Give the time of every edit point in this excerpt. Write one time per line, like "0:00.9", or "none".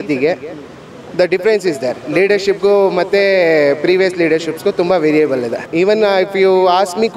0:05.6